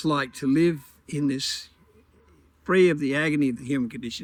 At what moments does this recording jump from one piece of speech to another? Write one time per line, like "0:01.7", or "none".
none